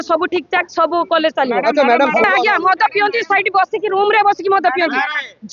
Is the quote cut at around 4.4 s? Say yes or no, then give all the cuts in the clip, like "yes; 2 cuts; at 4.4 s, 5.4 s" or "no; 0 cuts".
no; 1 cut; at 2.2 s